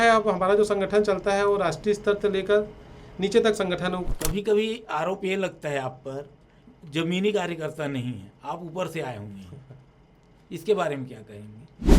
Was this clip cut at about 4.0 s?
yes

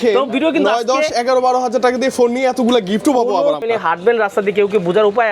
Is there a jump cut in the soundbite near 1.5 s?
no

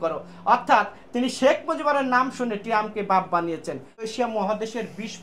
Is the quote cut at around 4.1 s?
yes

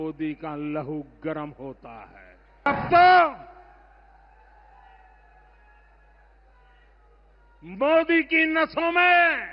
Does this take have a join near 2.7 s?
yes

